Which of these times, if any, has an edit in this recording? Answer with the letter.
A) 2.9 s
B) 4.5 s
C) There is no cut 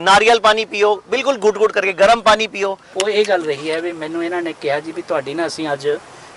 A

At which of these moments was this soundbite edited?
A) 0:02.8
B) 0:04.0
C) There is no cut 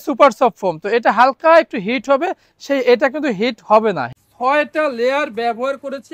B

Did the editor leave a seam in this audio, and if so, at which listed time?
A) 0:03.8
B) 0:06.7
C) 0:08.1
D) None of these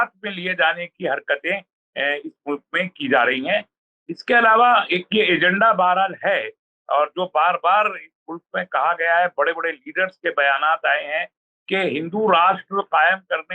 A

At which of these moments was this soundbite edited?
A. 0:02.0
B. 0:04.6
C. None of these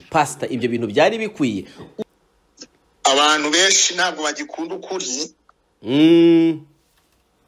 A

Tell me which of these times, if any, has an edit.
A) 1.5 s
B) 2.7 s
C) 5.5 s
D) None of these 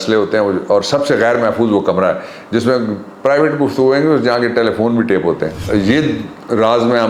C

